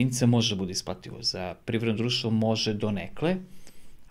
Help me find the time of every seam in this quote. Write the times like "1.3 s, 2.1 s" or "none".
none